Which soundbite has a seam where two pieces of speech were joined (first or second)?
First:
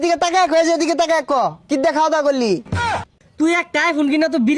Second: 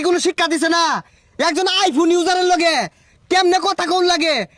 first